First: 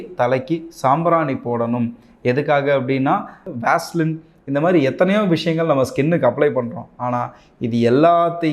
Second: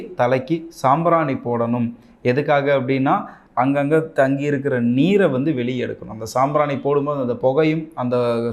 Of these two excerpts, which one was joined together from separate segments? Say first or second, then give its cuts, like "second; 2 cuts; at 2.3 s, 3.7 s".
first; 1 cut; at 3.4 s